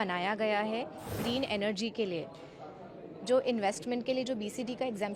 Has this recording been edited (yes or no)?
yes